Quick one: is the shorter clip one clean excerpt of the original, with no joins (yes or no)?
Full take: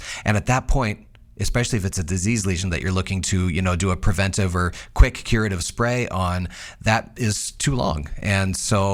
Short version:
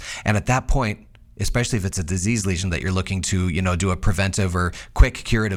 yes